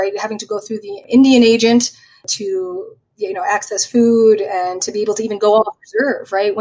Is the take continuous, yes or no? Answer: no